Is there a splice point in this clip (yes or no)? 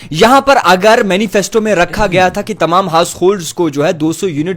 no